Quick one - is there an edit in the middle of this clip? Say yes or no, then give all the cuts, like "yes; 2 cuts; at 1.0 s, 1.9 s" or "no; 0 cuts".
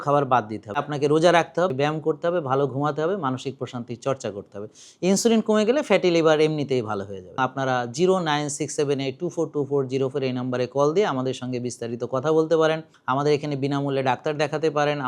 yes; 4 cuts; at 0.8 s, 1.7 s, 7.4 s, 12.9 s